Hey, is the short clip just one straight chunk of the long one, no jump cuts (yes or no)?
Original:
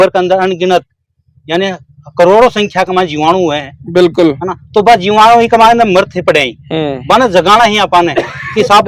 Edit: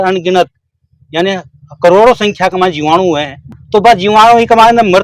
no